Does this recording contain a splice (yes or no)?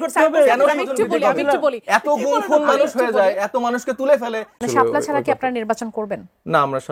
yes